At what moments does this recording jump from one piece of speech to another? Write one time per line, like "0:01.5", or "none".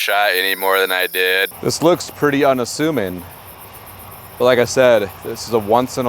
0:01.5